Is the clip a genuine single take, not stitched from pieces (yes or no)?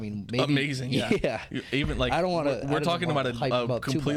yes